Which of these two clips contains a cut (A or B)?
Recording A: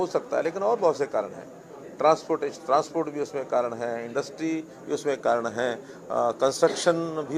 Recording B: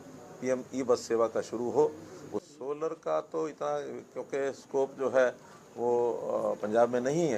B